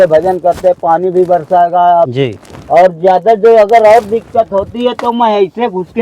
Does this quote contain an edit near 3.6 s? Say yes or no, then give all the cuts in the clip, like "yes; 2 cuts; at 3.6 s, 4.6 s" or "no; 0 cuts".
no; 1 cut; at 2.1 s